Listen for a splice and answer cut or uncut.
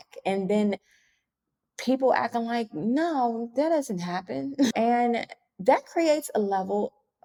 uncut